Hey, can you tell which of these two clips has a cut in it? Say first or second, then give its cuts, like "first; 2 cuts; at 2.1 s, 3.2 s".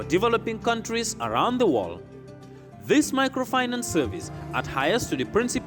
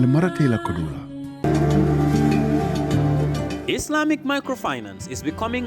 second; 1 cut; at 1.3 s